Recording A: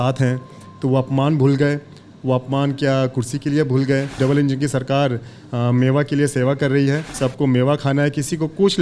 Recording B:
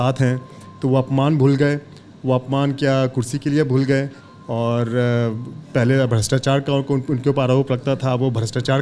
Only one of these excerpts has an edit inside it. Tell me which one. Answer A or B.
A